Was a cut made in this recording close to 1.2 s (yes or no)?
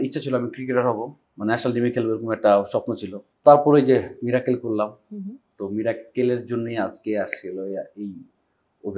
yes